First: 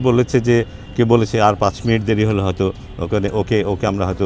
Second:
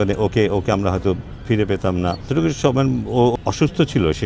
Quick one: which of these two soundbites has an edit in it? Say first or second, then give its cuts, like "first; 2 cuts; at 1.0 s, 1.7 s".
second; 2 cuts; at 2.3 s, 3.3 s